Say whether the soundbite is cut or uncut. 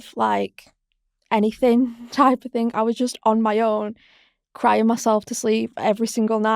uncut